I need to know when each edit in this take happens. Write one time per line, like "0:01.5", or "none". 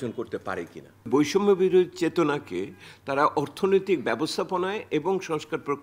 0:01.1